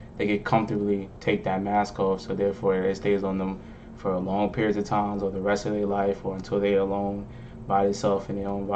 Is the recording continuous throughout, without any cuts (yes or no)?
yes